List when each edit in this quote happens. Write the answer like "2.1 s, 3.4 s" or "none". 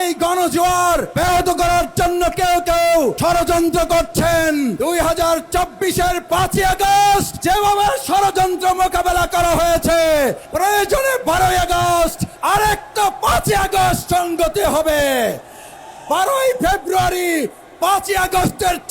1.1 s, 3.2 s, 4.8 s, 7.3 s, 10.4 s, 12.3 s